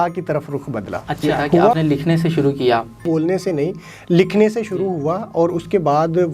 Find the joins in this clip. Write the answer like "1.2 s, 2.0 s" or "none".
1.8 s, 3.0 s